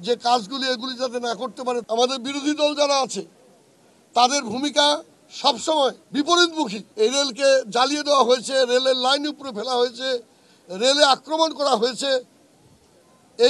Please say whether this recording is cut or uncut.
cut